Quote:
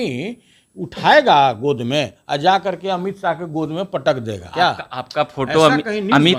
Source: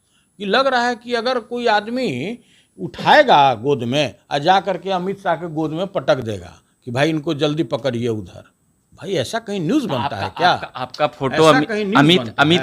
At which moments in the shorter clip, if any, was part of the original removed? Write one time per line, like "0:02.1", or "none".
0:04.4

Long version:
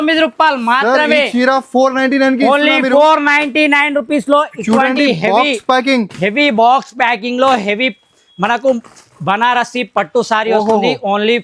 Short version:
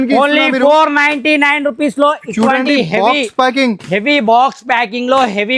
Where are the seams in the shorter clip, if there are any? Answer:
none

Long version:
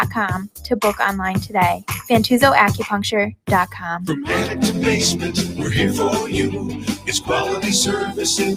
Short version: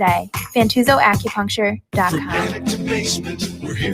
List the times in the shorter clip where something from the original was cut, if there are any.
0:02.1

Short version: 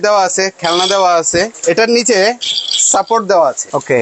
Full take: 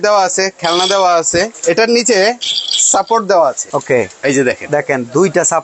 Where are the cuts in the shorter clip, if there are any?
none

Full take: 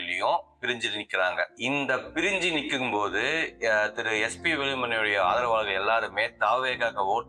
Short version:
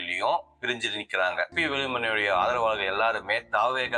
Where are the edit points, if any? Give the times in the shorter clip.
0:01.5

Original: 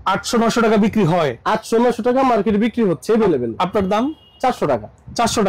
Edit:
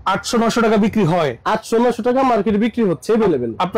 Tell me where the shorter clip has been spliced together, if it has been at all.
none

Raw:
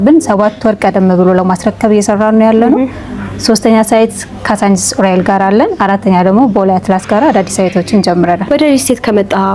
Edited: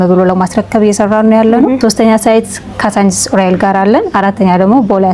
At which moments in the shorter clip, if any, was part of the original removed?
0:01.8

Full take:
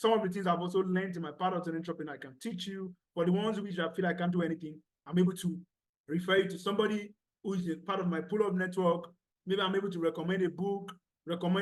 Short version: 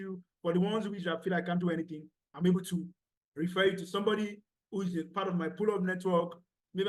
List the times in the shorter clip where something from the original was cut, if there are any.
none

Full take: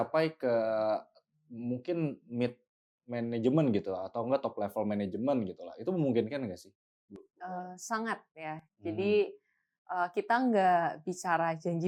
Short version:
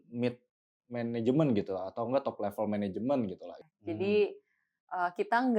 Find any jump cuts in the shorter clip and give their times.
0:03.5

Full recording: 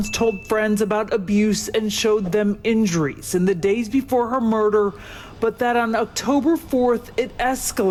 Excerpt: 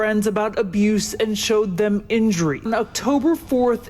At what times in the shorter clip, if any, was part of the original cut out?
0:02.7

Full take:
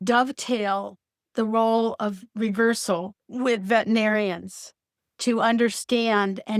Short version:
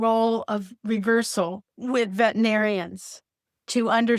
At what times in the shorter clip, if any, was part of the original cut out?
none

